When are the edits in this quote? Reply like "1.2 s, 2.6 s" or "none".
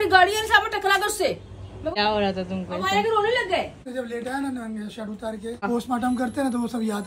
1.9 s, 3.8 s, 5.6 s